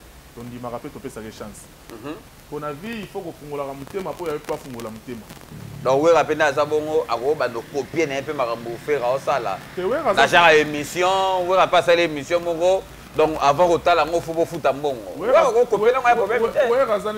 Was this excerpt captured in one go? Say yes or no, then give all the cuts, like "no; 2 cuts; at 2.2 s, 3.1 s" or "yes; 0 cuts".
no; 1 cut; at 5.5 s